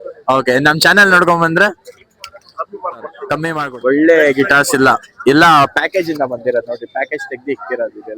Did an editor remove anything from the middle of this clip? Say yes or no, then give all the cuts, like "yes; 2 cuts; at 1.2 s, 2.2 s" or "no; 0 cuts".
yes; 1 cut; at 3.6 s